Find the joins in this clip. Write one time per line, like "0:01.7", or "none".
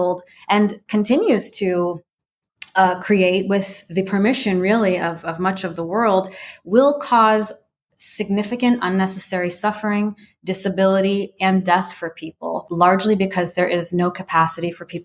0:12.7